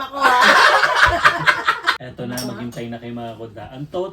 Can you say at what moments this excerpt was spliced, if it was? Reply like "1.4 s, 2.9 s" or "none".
2.0 s